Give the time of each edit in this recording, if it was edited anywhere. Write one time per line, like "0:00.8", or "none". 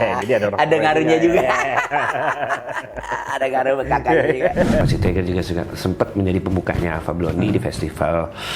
0:04.8